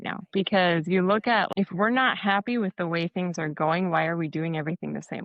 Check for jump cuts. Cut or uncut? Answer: cut